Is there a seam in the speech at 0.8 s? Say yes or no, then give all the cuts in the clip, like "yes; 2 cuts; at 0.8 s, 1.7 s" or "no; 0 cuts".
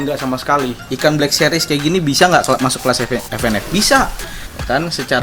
yes; 2 cuts; at 0.8 s, 4.2 s